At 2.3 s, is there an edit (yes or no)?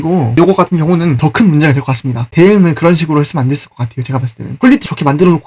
yes